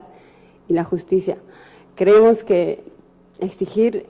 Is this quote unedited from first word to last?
yes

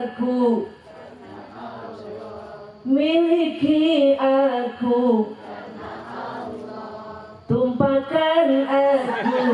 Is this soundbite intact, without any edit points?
yes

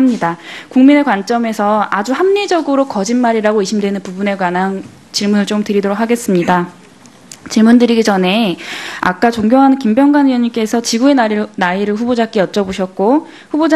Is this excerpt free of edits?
yes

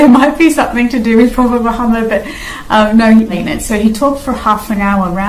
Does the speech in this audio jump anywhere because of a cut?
yes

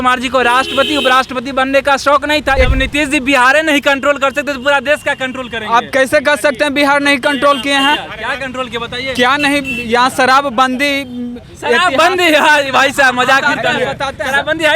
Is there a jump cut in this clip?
yes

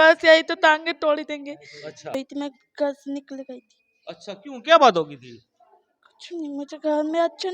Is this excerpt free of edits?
no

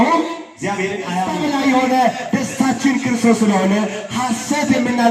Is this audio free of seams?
no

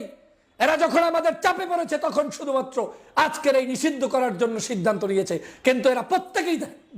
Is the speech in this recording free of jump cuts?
yes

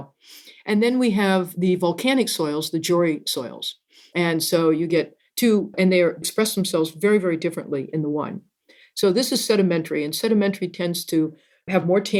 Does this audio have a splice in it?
no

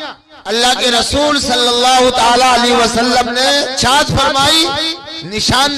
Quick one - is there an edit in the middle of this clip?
yes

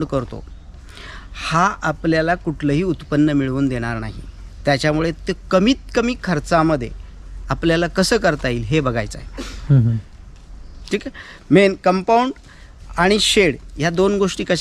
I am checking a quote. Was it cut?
no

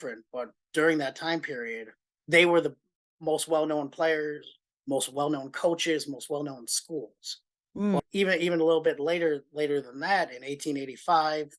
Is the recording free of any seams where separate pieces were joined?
no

